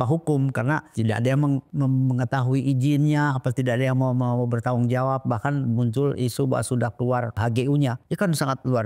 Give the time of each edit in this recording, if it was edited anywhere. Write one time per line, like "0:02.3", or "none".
0:00.9
0:01.7
0:07.4
0:08.0